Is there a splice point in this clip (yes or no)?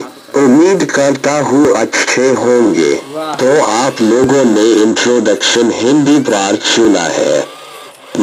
no